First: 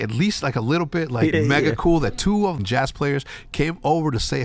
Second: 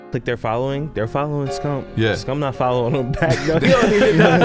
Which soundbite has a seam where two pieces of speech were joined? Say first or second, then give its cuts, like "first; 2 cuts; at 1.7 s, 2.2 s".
first; 2 cuts; at 1.3 s, 2.6 s